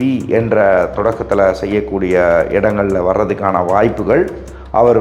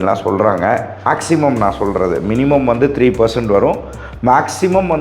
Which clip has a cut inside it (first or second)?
second